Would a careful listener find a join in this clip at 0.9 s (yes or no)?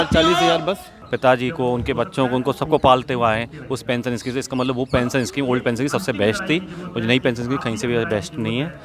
yes